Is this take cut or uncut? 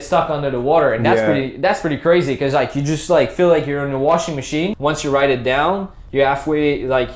cut